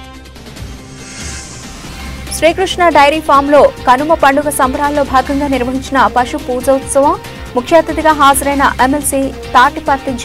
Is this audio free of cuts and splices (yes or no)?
no